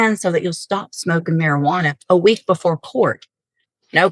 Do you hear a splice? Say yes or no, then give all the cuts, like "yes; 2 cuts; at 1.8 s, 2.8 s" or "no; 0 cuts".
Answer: no; 0 cuts